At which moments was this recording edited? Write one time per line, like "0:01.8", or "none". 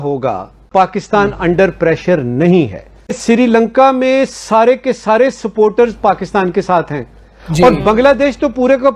0:03.2

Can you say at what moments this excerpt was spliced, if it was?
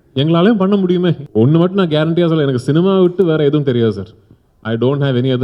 0:01.2

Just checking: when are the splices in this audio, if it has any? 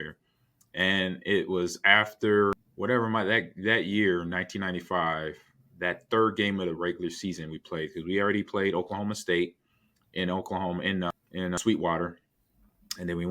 0:02.7
0:11.6

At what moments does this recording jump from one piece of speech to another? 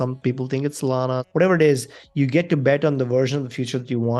0:01.2

